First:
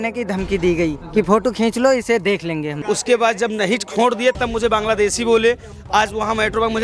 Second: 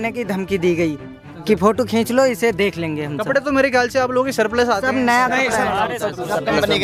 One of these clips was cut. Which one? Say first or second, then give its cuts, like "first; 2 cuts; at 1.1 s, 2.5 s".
first; 2 cuts; at 1.0 s, 2.7 s